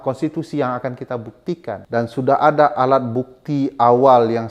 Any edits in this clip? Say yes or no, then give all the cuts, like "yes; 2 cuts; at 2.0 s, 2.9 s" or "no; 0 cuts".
yes; 1 cut; at 1.8 s